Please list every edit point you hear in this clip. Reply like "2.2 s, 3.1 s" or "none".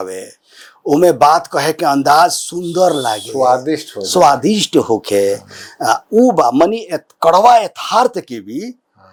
none